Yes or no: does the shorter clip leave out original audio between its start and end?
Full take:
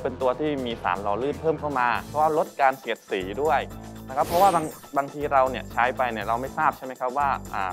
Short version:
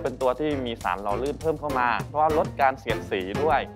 no